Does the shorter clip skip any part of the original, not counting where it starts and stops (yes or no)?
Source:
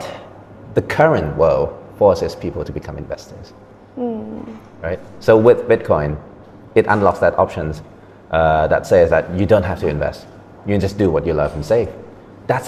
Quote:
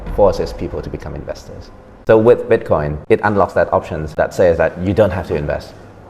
yes